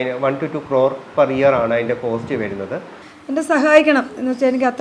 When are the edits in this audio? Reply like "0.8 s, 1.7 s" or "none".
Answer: 3.0 s